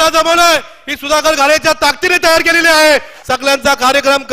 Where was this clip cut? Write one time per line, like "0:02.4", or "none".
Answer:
0:03.2